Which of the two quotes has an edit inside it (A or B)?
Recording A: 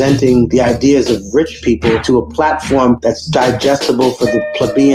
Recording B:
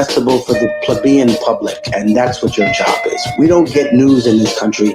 B